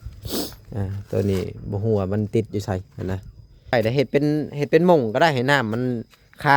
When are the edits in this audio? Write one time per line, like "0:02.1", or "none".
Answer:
0:03.7